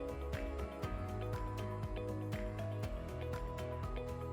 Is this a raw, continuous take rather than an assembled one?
yes; 0 cuts

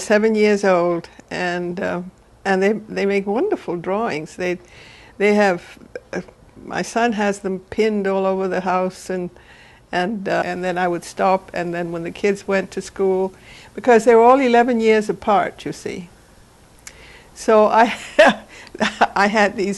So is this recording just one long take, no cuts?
yes; 0 cuts

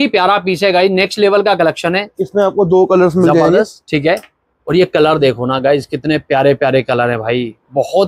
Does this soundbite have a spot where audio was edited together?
no; 0 cuts

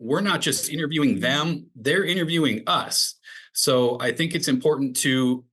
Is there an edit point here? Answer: no; 0 cuts

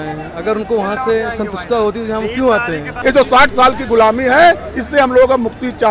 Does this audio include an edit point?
yes; 1 cut; at 3.0 s

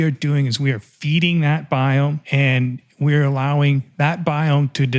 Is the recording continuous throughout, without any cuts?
no; 1 cut; at 2.2 s

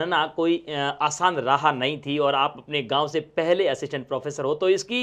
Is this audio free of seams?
yes; 0 cuts

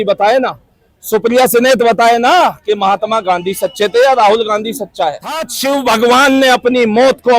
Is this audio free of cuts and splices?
no; 1 cut; at 5.5 s

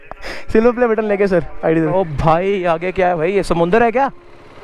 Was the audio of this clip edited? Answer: yes; 1 cut; at 1.9 s

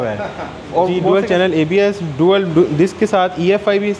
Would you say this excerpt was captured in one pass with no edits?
no; 1 cut; at 1.0 s

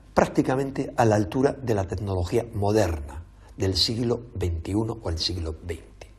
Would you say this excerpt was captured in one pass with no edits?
no; 1 cut; at 1.3 s

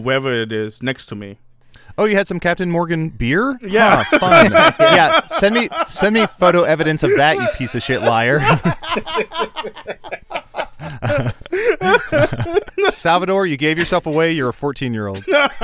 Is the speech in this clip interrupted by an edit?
yes; 1 cut; at 12.7 s

